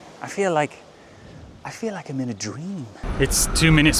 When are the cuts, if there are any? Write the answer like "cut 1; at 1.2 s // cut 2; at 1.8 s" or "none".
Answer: cut 1; at 3.0 s